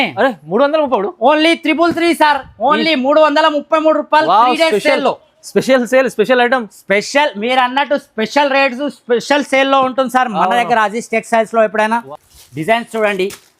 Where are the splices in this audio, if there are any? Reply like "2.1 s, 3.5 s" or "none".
12.1 s